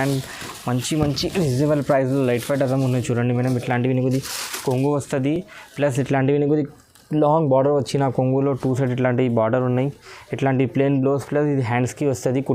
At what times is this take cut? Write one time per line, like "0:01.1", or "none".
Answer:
none